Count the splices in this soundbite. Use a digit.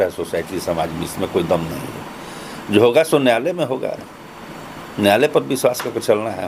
0